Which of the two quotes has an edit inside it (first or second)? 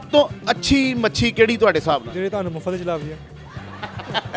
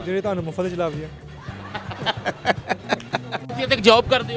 second